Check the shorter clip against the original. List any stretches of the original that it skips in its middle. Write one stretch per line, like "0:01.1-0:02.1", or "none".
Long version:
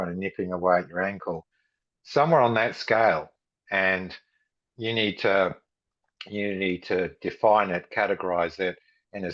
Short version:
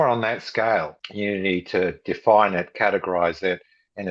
0:03.4-0:06.2